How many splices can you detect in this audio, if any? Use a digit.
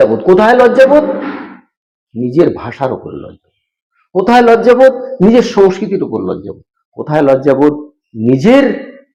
0